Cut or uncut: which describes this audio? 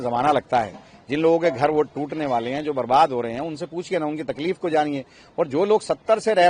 uncut